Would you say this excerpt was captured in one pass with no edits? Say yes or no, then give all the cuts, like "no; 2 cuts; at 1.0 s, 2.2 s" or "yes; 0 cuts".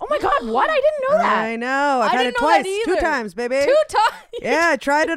yes; 0 cuts